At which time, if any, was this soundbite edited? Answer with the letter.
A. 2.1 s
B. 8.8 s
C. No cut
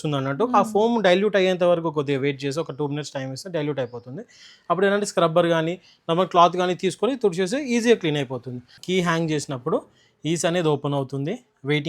B